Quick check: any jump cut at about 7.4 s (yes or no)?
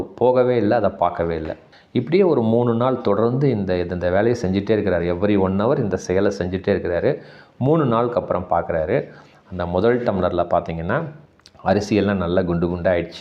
no